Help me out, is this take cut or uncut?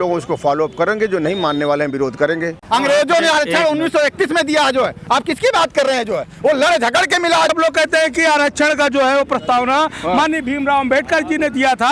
cut